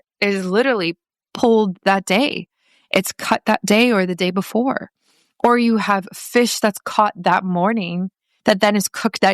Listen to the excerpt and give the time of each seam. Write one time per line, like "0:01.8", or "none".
0:01.2